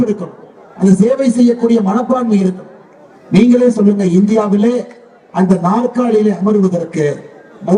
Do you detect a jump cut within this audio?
no; 0 cuts

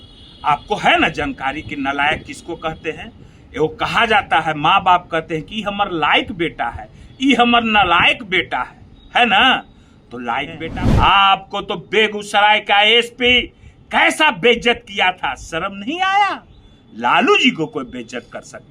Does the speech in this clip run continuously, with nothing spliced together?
no; 1 cut; at 10.6 s

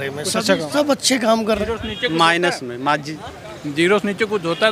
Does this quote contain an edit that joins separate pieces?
yes; 1 cut; at 1.6 s

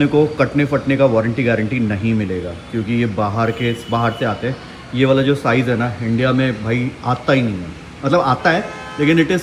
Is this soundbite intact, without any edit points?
yes; 0 cuts

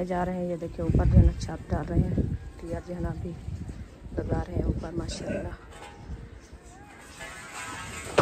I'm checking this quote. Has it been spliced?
no; 0 cuts

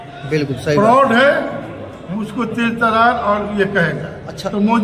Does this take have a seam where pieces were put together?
no; 0 cuts

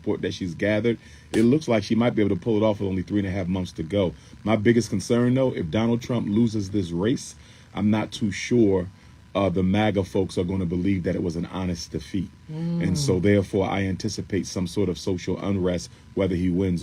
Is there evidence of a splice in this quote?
no; 0 cuts

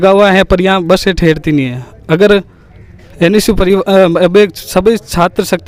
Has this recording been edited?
no; 0 cuts

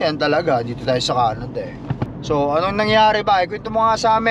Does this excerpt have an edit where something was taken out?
yes; 1 cut; at 2.1 s

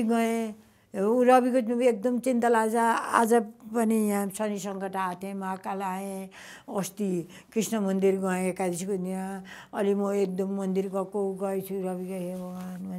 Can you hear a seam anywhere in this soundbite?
no; 0 cuts

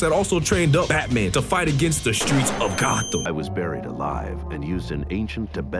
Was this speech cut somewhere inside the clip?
yes; 1 cut; at 3.2 s

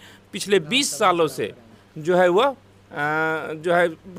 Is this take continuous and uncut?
yes; 0 cuts

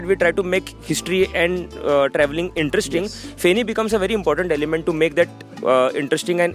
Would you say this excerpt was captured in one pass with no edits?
yes; 0 cuts

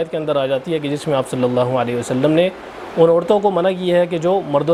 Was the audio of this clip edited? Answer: no; 0 cuts

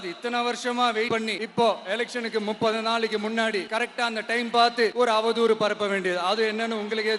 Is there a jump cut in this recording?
no; 0 cuts

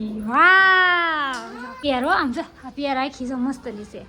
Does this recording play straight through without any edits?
no; 1 cut; at 1.7 s

